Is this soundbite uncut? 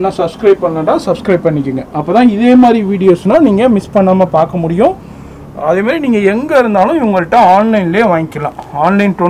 yes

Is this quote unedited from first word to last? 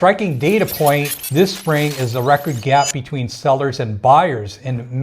no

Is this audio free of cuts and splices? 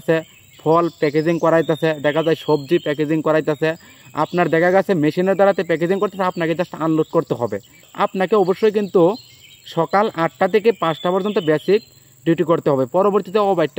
no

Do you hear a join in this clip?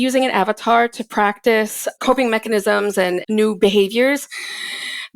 yes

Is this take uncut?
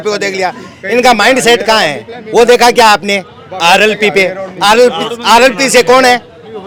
yes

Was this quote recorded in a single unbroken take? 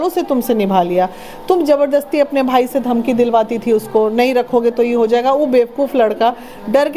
yes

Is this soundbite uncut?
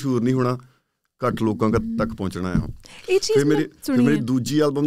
yes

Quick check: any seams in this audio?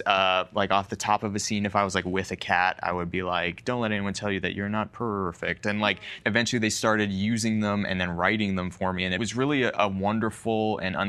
yes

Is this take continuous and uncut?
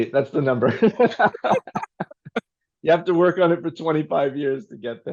yes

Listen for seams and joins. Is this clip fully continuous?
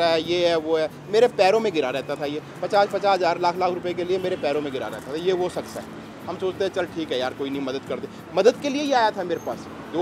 yes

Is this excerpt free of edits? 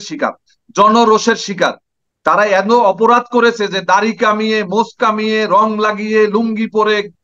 no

